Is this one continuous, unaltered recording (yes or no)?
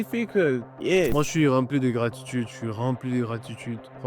no